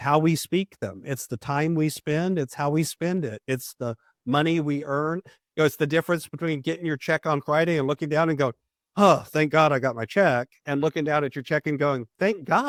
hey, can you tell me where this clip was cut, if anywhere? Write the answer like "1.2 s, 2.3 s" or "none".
none